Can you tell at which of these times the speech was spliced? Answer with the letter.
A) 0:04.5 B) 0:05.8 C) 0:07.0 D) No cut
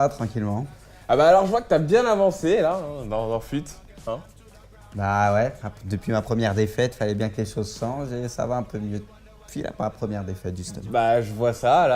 A